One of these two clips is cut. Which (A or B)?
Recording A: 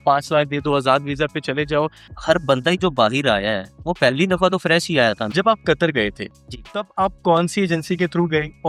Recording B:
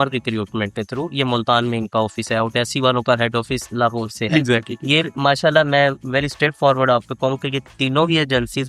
A